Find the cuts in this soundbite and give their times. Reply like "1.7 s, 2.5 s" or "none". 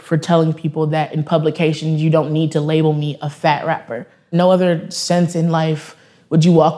4.3 s

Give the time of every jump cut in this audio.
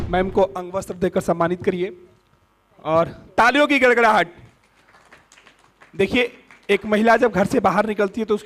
none

